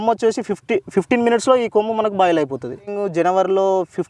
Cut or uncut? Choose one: cut